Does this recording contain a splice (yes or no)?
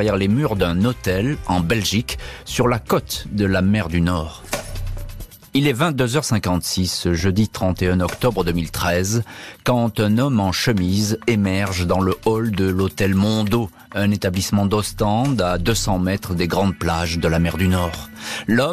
no